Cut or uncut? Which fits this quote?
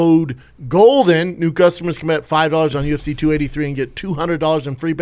uncut